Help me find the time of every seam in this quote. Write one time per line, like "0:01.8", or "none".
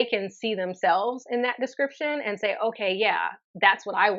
none